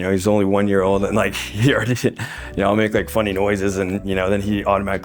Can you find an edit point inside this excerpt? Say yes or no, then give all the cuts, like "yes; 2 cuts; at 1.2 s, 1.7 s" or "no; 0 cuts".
no; 0 cuts